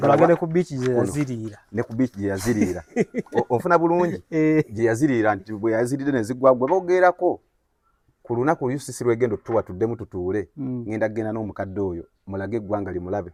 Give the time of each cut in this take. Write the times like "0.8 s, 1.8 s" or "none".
none